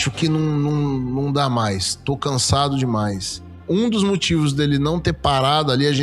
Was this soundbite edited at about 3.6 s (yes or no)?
yes